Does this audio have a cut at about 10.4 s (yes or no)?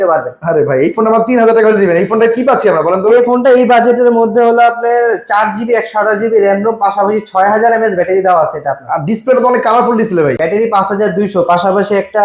yes